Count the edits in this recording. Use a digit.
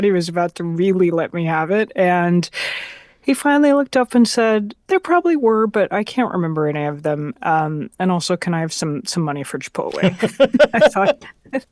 1